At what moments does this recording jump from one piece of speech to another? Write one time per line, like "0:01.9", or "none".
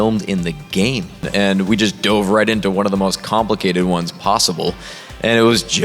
0:01.3